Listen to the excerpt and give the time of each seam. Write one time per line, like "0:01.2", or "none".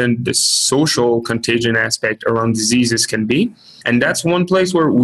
0:03.7